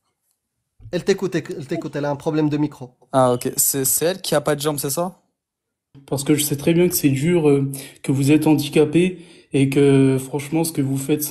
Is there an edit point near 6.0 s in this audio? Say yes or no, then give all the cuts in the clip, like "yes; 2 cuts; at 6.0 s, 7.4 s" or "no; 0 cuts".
yes; 1 cut; at 6.0 s